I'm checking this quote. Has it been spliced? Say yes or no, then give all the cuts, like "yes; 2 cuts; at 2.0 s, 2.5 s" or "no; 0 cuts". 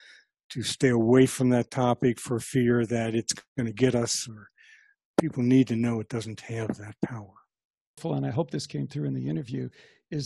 yes; 2 cuts; at 5.1 s, 8.0 s